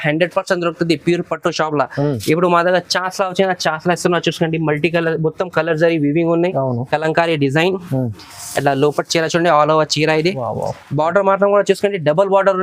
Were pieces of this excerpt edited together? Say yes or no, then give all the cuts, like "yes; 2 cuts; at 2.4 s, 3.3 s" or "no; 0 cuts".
no; 0 cuts